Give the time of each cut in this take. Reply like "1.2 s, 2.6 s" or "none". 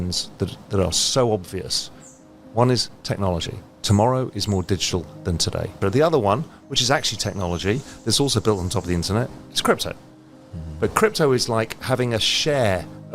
5.8 s